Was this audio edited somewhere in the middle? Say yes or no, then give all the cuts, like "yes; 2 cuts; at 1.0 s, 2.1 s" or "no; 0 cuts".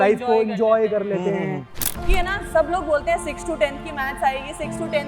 yes; 1 cut; at 1.9 s